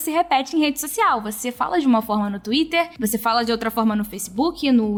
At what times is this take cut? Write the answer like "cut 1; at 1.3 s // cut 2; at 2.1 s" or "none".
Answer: none